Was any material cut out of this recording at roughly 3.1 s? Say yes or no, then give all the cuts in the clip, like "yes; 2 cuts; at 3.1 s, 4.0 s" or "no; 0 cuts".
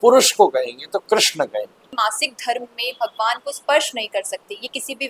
no; 1 cut; at 1.9 s